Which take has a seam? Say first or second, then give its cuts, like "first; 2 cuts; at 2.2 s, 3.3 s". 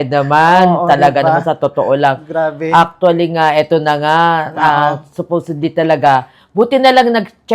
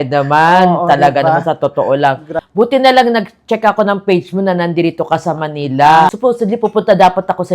second; 2 cuts; at 2.3 s, 6.1 s